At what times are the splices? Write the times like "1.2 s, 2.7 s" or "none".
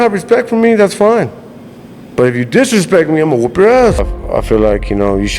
4.2 s